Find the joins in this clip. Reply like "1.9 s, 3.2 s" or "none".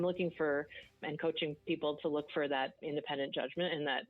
1.0 s, 2.8 s